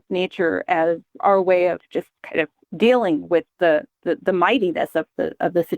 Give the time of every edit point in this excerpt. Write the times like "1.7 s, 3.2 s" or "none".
1.2 s, 2.6 s